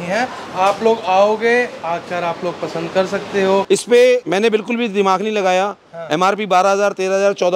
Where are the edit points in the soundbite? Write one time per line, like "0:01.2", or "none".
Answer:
0:03.6